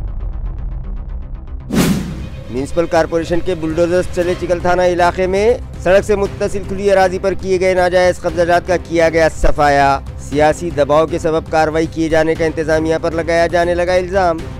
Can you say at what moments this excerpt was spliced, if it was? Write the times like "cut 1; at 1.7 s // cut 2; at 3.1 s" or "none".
cut 1; at 1.8 s

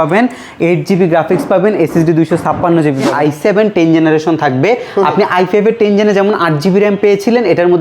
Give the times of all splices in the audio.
cut 1; at 3.1 s

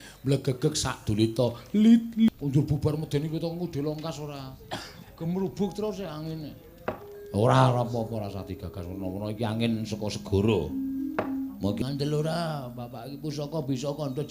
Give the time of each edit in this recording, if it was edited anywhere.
cut 1; at 2.3 s // cut 2; at 11.8 s

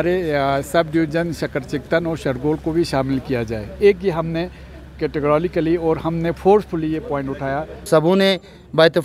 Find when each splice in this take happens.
cut 1; at 7.9 s

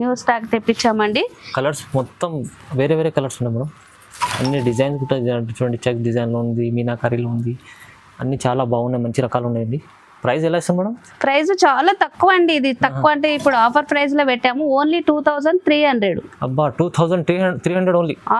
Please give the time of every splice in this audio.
none

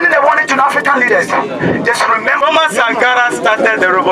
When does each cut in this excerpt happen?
cut 1; at 2.4 s

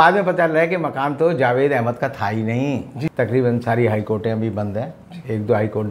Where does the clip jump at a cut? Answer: cut 1; at 3.1 s

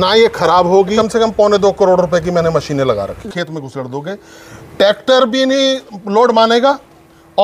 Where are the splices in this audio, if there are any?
cut 1; at 0.9 s // cut 2; at 3.2 s

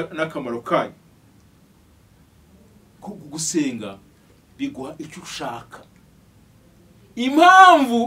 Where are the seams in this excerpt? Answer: none

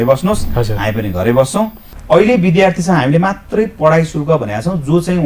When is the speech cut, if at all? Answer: cut 1; at 1.9 s

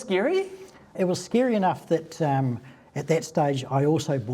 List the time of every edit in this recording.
cut 1; at 0.9 s

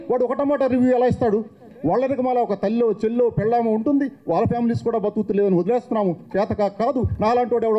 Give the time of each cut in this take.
cut 1; at 1.7 s

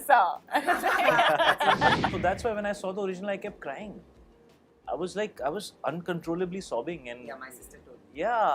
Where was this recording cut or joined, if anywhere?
cut 1; at 2.1 s

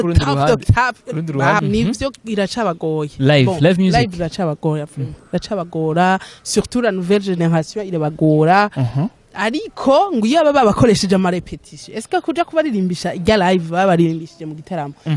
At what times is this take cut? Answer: cut 1; at 1.6 s

